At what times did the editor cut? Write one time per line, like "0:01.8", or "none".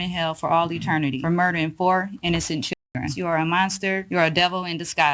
0:01.2
0:03.1
0:04.0